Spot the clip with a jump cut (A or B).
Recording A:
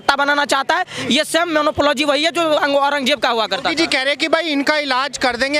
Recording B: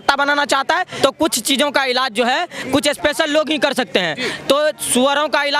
B